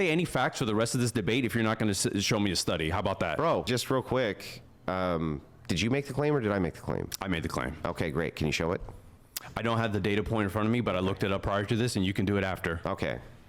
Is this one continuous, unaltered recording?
no; 1 cut; at 3.7 s

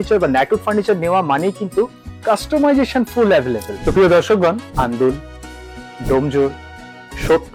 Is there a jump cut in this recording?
no; 0 cuts

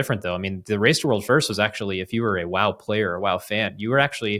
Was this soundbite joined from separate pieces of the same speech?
no; 0 cuts

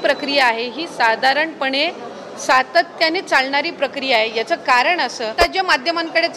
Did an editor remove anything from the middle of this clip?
yes; 1 cut; at 5.3 s

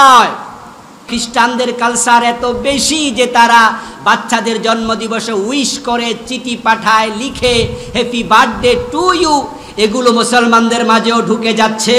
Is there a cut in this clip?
yes; 1 cut; at 1.1 s

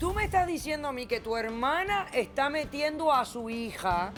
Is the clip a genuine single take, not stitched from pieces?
yes; 0 cuts

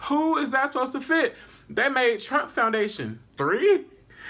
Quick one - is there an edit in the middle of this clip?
yes; 1 cut; at 3.3 s

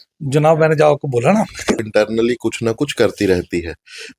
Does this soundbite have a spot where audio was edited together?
yes; 1 cut; at 1.8 s

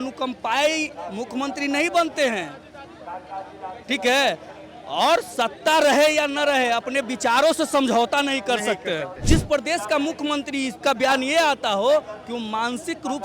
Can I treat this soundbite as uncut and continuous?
no; 1 cut; at 9.2 s

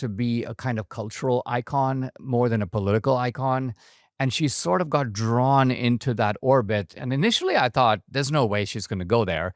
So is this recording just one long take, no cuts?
yes; 0 cuts

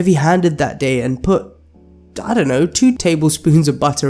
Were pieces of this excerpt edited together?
yes; 1 cut; at 3.0 s

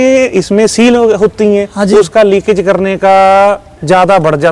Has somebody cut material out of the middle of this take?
no; 0 cuts

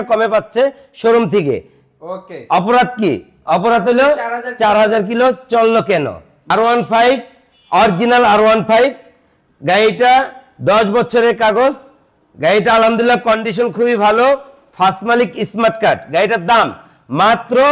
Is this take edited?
no; 0 cuts

